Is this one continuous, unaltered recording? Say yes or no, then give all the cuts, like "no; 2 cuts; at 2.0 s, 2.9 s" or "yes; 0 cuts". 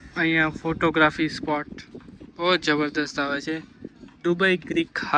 yes; 0 cuts